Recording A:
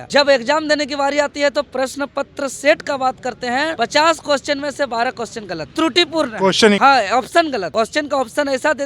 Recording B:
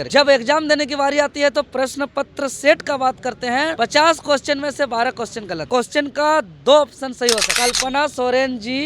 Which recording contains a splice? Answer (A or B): B